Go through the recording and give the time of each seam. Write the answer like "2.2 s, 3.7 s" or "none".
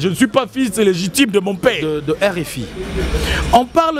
1.9 s